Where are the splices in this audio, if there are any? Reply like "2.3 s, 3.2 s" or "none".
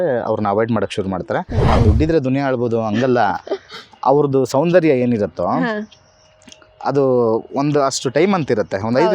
1.7 s